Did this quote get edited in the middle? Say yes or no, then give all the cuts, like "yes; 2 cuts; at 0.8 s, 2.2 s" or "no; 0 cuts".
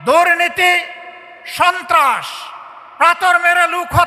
no; 0 cuts